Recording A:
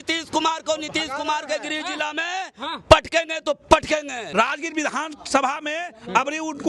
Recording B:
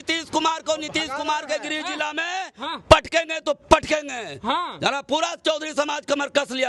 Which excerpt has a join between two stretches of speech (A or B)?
A